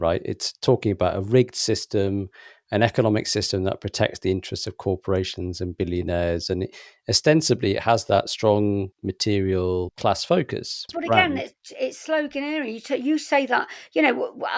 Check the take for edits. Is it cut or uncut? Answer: cut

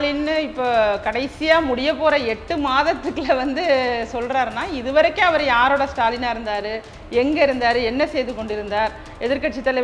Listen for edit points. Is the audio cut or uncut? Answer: uncut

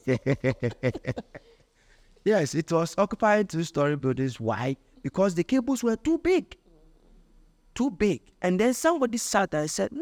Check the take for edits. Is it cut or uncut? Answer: uncut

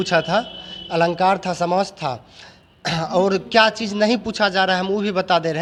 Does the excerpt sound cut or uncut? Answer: uncut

